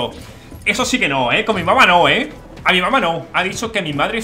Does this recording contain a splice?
yes; 1 cut; at 3.3 s

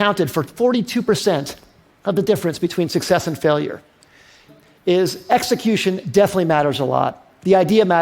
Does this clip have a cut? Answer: yes; 1 cut; at 4.5 s

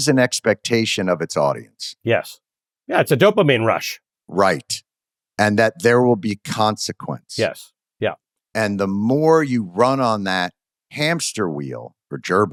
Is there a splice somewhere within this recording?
no; 0 cuts

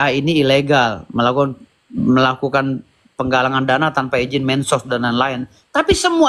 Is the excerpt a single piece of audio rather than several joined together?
yes; 0 cuts

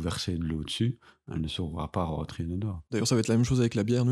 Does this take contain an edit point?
yes; 1 cut; at 2.8 s

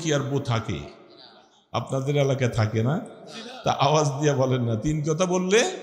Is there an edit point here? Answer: no; 0 cuts

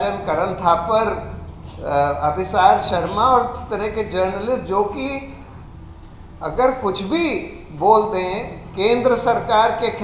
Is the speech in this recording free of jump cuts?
yes; 0 cuts

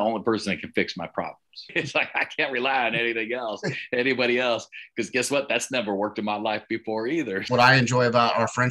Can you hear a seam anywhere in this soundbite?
yes; 2 cuts; at 1.7 s, 7.5 s

